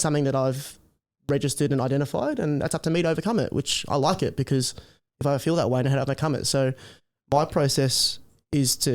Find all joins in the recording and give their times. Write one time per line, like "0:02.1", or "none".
none